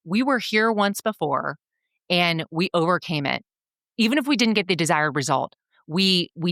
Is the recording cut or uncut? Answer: uncut